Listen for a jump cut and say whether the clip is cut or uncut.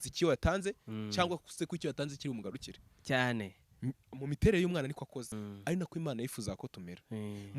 cut